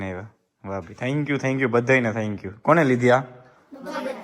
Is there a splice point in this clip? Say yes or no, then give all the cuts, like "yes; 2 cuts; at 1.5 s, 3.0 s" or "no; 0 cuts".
no; 0 cuts